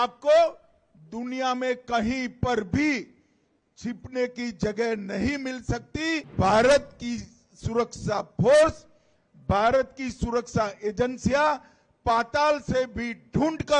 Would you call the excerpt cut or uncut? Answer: cut